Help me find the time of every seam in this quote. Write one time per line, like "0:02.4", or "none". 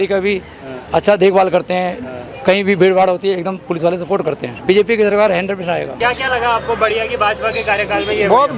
0:04.5
0:05.9